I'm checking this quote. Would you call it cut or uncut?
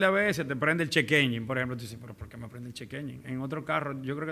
uncut